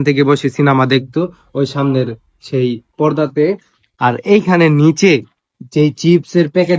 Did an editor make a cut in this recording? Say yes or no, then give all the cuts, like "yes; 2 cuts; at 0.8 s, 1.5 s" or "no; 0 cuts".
no; 0 cuts